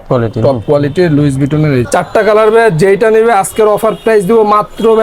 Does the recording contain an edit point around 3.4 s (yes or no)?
no